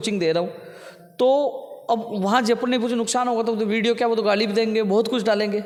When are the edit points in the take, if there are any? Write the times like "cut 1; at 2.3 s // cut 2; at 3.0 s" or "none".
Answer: none